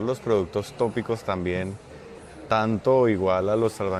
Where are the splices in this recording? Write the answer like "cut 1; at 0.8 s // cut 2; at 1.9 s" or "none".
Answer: none